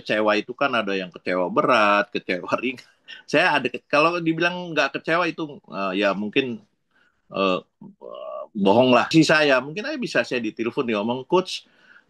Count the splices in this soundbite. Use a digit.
1